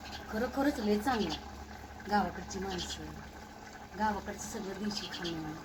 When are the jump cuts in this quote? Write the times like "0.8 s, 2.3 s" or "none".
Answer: none